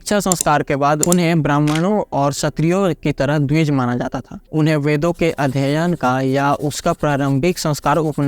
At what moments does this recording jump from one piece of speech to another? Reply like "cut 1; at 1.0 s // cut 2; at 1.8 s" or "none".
cut 1; at 4.3 s